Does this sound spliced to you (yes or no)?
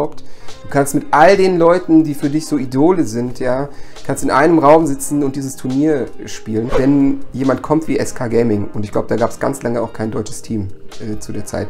yes